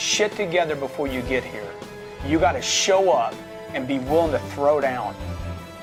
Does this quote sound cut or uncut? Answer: uncut